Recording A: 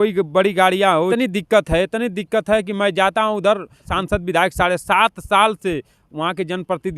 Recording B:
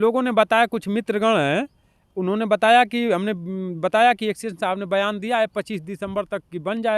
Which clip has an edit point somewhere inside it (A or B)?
A